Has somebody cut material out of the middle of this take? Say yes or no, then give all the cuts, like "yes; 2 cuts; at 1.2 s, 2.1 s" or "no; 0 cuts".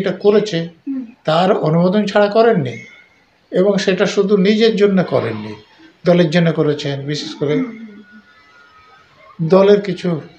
no; 0 cuts